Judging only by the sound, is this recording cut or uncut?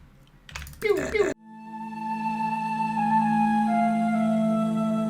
cut